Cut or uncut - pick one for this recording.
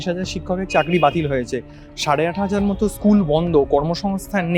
uncut